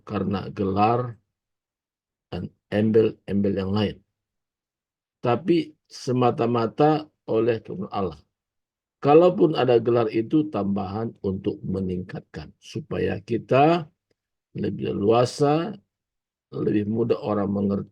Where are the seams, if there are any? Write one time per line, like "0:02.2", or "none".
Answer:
none